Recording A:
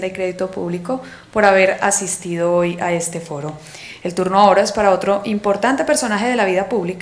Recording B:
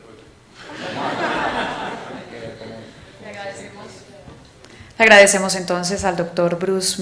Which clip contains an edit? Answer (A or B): B